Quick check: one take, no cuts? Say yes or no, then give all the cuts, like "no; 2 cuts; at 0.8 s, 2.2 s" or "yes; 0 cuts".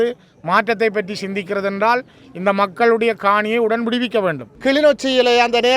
no; 1 cut; at 4.5 s